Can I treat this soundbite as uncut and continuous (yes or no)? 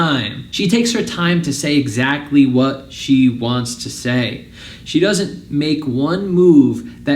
yes